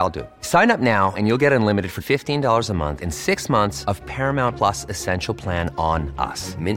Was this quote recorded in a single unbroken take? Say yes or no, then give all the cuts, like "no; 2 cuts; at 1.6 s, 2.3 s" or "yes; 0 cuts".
yes; 0 cuts